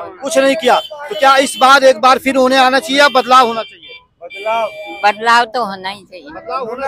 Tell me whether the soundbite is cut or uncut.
uncut